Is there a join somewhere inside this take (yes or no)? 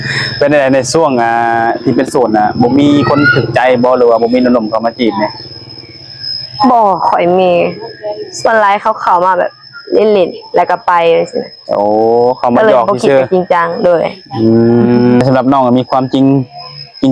yes